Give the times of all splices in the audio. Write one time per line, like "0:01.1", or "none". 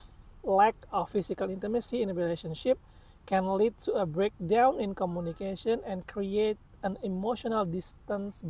none